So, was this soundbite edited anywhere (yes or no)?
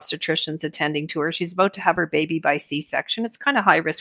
no